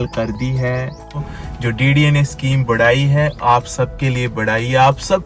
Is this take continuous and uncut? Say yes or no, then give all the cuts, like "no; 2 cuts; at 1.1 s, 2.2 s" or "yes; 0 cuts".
no; 1 cut; at 1.2 s